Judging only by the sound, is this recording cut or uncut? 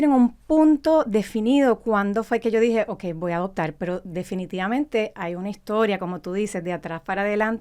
uncut